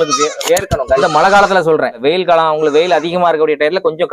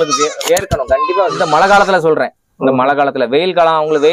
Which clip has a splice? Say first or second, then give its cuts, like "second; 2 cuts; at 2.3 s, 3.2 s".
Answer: first; 2 cuts; at 1.0 s, 2.0 s